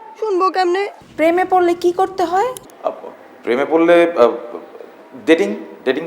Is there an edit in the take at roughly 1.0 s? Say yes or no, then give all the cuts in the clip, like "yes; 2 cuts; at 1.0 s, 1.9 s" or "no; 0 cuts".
yes; 1 cut; at 1.0 s